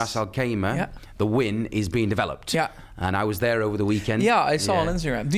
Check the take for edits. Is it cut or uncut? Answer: uncut